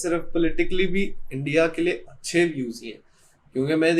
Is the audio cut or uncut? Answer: uncut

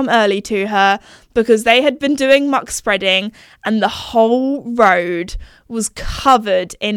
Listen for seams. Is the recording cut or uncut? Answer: uncut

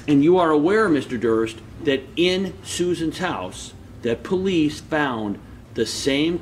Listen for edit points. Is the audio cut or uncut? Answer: uncut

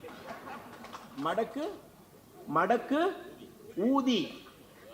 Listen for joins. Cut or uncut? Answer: uncut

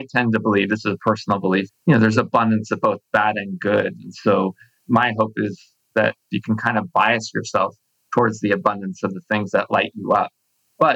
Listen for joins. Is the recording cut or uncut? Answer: cut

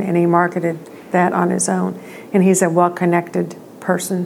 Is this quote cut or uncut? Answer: uncut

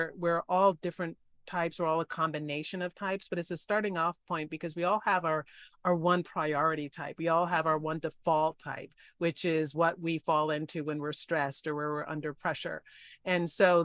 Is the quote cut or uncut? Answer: uncut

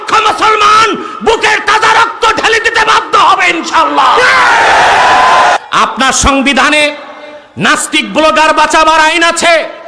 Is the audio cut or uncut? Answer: cut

